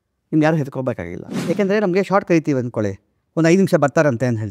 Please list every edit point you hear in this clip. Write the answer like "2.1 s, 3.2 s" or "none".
1.4 s